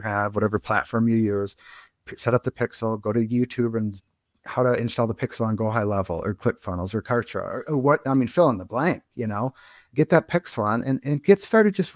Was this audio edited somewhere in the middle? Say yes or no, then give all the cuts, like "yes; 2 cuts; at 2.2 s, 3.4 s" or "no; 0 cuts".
no; 0 cuts